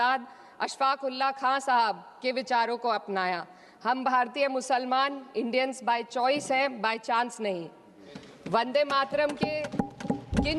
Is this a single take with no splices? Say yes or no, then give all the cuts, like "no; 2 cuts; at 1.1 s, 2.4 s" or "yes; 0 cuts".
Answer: yes; 0 cuts